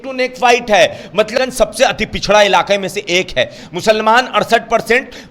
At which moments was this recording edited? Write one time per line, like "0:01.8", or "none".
0:01.3